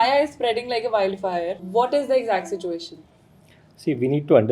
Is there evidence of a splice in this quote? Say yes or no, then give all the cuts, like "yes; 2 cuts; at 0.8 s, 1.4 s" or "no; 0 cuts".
yes; 1 cut; at 1.6 s